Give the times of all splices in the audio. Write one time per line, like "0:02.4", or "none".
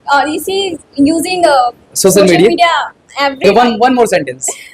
0:03.4